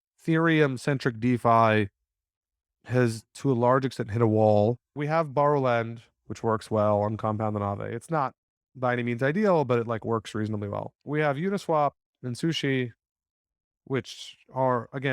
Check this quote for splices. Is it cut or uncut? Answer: cut